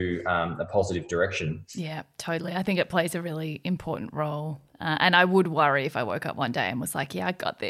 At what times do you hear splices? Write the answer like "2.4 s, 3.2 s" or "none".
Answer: none